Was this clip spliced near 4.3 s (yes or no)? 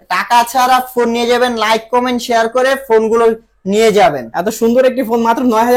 yes